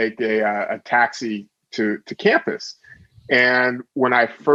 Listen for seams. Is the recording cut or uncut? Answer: uncut